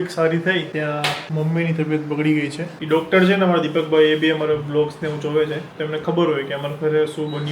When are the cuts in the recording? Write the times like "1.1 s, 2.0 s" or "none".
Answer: 1.0 s, 2.8 s